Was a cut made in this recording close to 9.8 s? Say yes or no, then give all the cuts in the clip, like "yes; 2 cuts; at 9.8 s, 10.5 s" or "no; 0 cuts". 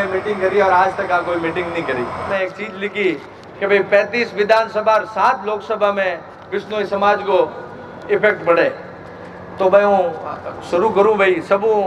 no; 1 cut; at 2.3 s